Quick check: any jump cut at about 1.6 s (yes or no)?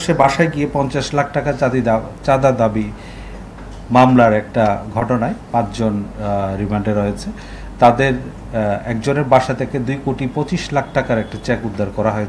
no